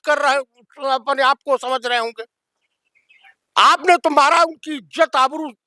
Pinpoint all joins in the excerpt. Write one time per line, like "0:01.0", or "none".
none